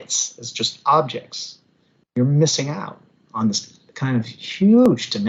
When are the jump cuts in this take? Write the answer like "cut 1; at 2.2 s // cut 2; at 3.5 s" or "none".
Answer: none